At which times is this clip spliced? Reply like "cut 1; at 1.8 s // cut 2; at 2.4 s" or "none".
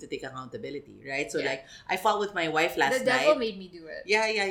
none